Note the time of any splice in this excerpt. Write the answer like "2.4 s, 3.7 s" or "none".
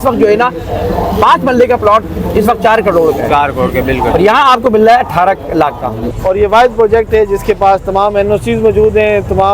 6.0 s